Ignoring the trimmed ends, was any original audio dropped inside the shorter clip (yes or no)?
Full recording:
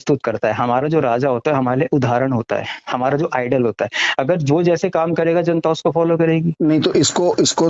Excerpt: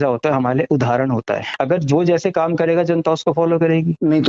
yes